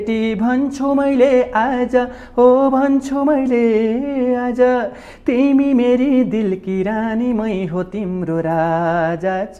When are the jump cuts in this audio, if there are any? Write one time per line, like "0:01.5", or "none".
none